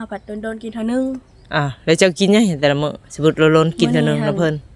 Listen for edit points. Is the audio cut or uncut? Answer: uncut